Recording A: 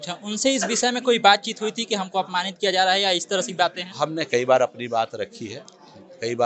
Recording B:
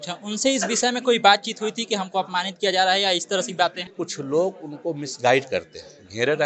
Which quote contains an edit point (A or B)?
B